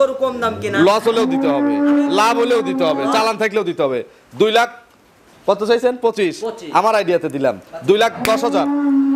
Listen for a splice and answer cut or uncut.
uncut